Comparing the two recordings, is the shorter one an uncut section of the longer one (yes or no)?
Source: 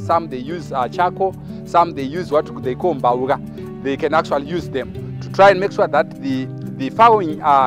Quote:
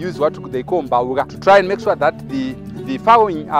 no